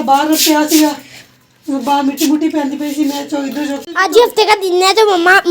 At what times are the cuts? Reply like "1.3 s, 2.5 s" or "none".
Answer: 3.8 s